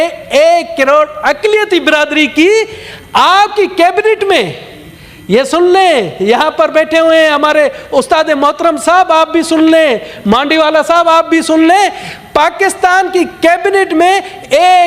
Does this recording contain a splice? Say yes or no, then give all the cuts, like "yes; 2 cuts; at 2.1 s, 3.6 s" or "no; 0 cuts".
no; 0 cuts